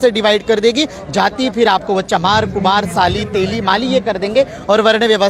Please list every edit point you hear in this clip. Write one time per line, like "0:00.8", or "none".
none